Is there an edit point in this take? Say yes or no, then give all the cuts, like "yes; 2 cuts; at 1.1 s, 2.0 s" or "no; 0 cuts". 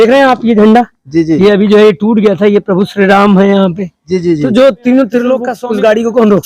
yes; 1 cut; at 5.5 s